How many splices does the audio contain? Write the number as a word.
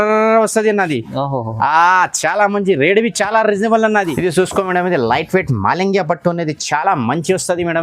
one